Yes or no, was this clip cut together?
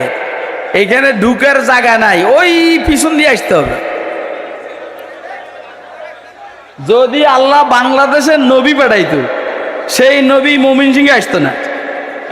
no